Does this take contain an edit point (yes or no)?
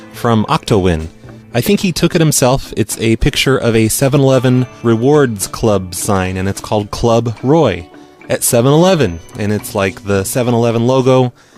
yes